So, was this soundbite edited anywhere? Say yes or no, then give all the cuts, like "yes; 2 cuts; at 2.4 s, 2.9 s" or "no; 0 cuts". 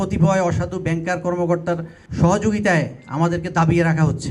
yes; 1 cut; at 2.0 s